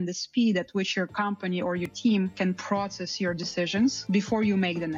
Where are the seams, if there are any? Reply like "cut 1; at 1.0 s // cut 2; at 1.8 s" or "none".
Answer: cut 1; at 4.0 s